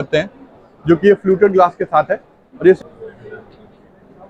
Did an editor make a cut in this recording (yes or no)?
yes